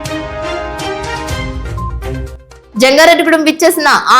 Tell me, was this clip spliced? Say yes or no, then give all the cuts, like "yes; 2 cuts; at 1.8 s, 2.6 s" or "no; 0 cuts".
yes; 2 cuts; at 1.1 s, 2.1 s